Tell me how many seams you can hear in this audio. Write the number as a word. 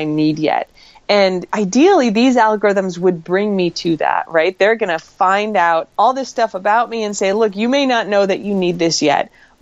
two